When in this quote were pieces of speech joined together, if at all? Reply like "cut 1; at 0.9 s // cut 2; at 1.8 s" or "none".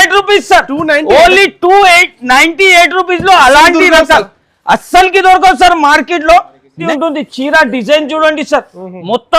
cut 1; at 6.8 s